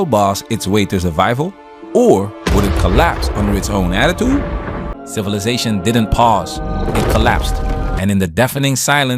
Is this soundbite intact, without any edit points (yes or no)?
no